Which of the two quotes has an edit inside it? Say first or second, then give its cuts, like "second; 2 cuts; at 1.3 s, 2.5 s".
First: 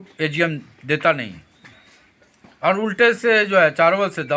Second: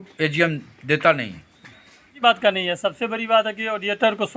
second; 1 cut; at 2.1 s